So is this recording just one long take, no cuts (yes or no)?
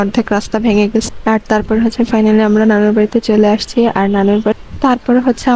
no